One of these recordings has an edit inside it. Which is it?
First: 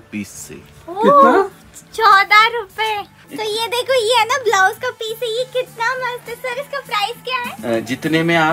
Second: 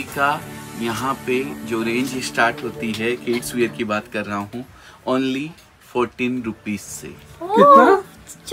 first; 2 cuts; at 3.2 s, 7.5 s

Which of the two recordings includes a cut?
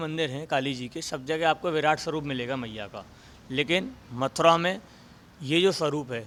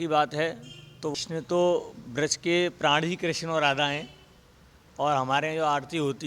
second; 1 cut; at 1.1 s

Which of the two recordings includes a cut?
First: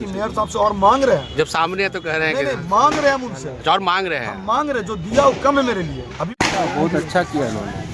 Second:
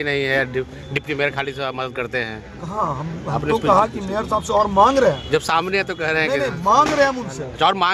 first; 1 cut; at 6.3 s

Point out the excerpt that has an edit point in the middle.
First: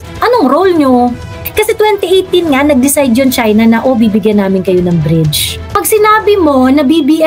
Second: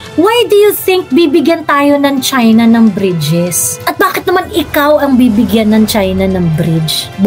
first; 2 cuts; at 1.4 s, 5.7 s

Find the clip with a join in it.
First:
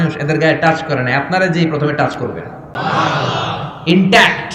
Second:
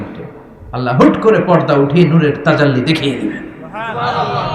first; 1 cut; at 2.8 s

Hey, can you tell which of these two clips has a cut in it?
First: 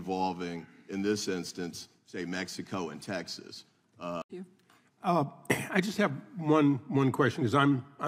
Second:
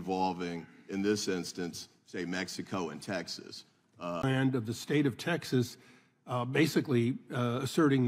first; 1 cut; at 4.2 s

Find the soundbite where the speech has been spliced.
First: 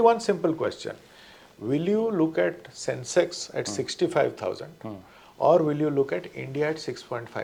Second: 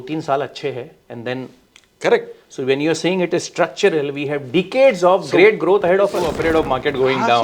second; 1 cut; at 6.3 s

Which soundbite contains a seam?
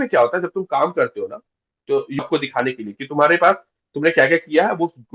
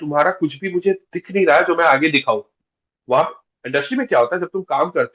first; 1 cut; at 2.2 s

